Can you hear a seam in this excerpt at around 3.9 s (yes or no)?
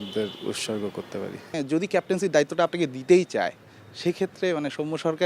no